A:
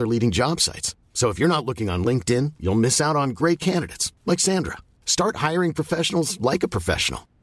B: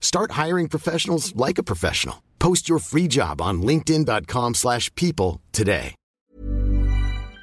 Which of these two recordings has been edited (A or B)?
B